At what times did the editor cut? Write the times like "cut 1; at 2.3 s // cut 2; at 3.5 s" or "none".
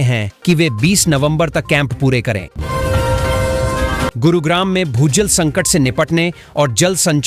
cut 1; at 2.5 s // cut 2; at 4.2 s